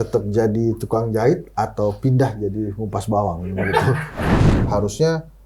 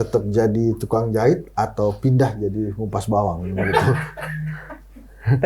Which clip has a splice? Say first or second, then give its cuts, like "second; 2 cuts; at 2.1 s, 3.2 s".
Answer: first; 1 cut; at 4.5 s